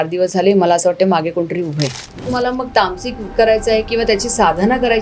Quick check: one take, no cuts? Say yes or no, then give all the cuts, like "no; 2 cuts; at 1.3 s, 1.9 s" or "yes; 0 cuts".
no; 1 cut; at 2.3 s